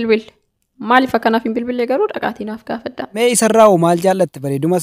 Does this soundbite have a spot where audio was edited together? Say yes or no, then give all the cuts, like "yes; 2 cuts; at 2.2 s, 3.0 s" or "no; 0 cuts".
yes; 1 cut; at 3.1 s